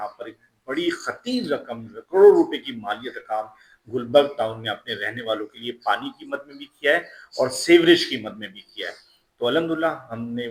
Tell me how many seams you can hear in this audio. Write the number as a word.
zero